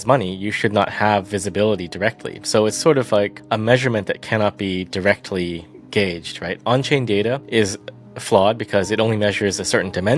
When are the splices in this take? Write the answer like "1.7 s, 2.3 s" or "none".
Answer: 3.4 s, 7.4 s